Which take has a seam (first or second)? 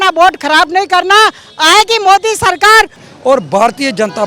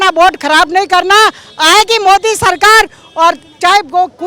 first